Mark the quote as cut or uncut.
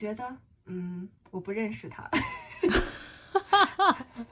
uncut